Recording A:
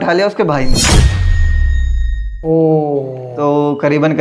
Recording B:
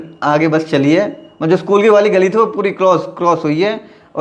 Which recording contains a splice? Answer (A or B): A